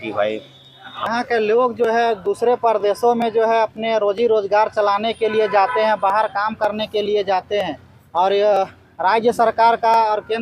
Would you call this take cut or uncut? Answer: cut